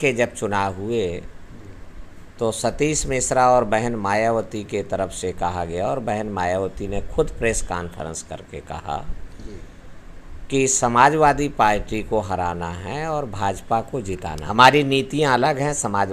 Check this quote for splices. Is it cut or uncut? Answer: cut